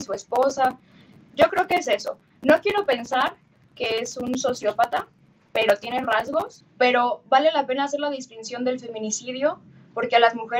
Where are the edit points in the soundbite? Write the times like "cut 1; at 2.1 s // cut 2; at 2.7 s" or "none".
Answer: cut 1; at 6.6 s